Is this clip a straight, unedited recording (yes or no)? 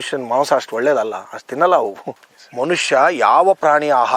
no